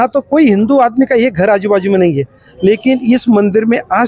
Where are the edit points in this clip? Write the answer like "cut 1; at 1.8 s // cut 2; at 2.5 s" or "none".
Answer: none